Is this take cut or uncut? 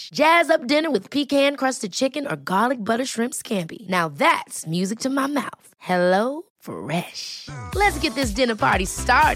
uncut